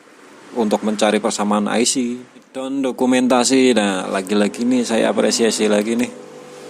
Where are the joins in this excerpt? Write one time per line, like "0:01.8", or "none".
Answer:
0:02.8